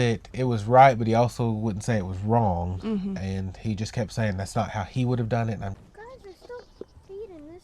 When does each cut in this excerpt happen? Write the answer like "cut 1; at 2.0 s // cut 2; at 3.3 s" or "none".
cut 1; at 5.8 s